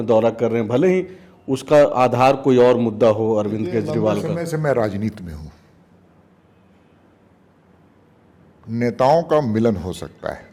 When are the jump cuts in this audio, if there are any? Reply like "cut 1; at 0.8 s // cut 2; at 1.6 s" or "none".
none